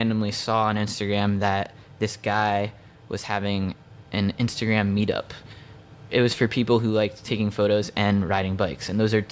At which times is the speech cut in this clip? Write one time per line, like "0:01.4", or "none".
none